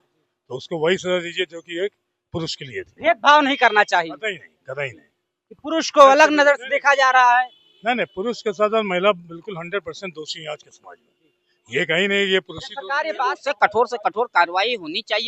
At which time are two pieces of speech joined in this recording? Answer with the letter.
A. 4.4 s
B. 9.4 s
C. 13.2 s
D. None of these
C